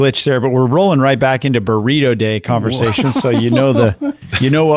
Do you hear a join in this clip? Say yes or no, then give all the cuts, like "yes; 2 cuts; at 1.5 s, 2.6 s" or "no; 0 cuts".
no; 0 cuts